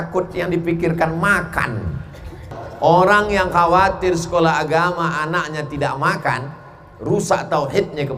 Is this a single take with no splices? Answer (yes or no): no